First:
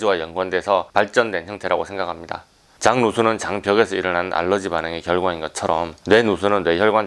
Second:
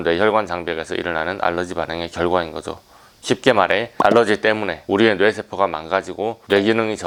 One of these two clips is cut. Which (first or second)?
first